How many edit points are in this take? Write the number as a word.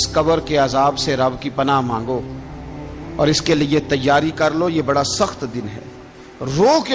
zero